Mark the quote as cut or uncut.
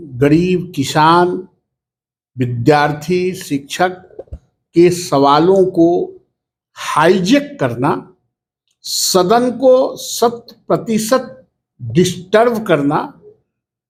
uncut